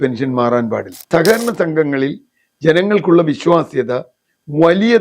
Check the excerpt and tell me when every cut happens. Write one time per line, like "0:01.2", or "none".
0:01.1